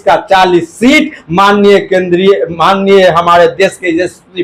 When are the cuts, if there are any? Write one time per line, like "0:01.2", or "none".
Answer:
none